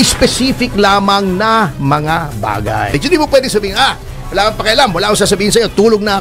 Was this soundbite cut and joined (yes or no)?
yes